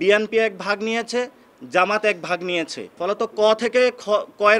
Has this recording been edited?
yes; 1 cut; at 2.8 s

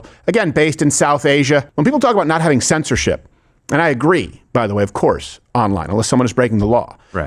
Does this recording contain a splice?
yes; 1 cut; at 1.7 s

